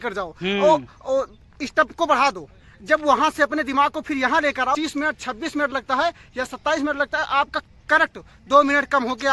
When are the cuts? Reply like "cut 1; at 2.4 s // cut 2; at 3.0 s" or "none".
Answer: cut 1; at 4.7 s